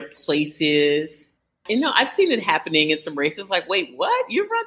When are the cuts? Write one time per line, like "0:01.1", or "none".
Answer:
0:01.6